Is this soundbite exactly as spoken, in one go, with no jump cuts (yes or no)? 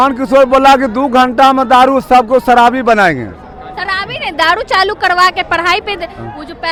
yes